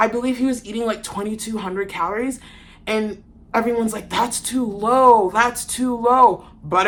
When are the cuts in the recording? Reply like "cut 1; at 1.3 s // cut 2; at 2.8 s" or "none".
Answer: none